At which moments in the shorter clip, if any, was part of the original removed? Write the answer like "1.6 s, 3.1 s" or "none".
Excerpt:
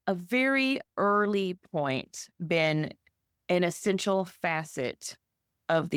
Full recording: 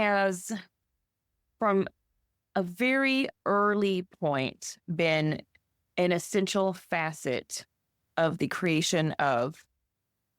none